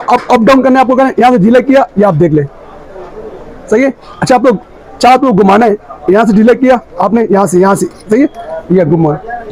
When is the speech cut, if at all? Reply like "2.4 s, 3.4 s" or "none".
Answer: none